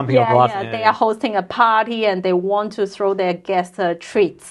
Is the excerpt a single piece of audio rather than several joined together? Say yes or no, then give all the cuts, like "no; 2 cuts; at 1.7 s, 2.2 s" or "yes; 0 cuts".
yes; 0 cuts